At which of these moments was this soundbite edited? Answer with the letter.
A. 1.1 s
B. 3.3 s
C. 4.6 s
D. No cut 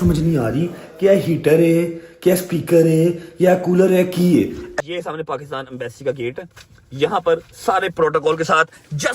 C